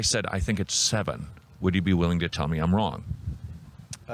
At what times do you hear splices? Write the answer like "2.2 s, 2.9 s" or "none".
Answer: none